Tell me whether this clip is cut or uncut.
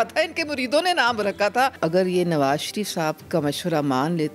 cut